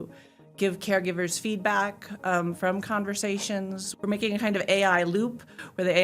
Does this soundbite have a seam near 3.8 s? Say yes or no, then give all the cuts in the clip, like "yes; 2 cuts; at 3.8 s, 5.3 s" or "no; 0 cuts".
yes; 1 cut; at 3.8 s